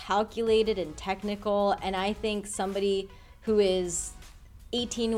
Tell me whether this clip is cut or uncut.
uncut